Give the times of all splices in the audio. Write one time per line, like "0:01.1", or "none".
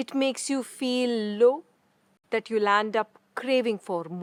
none